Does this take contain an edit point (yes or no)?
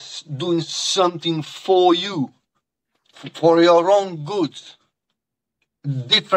no